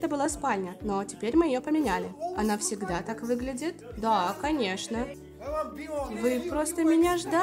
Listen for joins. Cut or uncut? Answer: cut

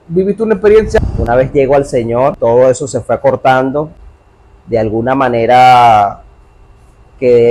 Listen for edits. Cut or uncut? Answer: cut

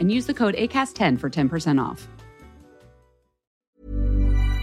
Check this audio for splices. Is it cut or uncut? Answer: cut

